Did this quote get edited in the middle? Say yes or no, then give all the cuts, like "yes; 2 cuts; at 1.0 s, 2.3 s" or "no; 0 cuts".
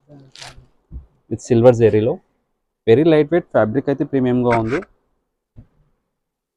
no; 0 cuts